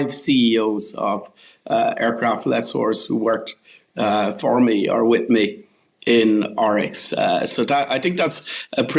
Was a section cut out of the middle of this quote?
no; 0 cuts

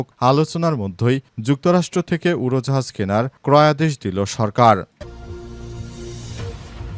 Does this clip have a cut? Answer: yes; 1 cut; at 4.9 s

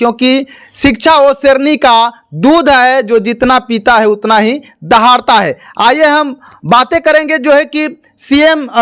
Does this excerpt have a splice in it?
no; 0 cuts

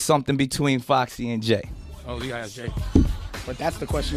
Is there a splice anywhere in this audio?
no; 0 cuts

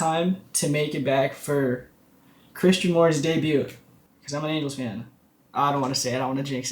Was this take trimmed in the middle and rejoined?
yes; 1 cut; at 5.4 s

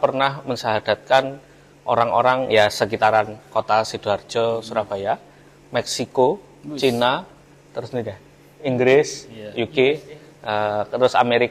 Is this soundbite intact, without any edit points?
yes; 0 cuts

